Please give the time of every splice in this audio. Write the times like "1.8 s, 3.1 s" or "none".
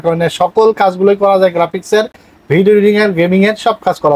none

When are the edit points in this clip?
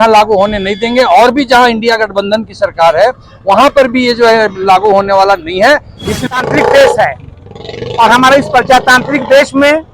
6.1 s

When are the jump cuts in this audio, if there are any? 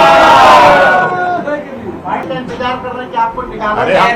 2.3 s

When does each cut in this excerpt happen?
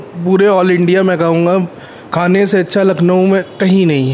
none

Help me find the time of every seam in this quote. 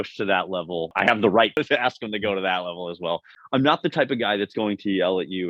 0.9 s, 1.6 s, 3.3 s

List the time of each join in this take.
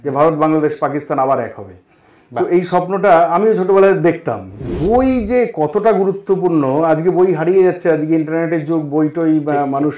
4.5 s

